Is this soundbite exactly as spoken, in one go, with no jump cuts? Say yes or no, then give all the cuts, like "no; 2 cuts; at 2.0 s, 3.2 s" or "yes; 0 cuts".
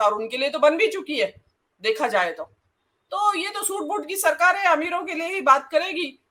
yes; 0 cuts